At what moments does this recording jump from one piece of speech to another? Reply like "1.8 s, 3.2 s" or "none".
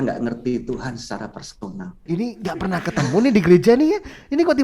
2.0 s